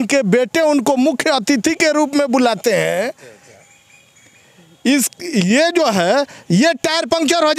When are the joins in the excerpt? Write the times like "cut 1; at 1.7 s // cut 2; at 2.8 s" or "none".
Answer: none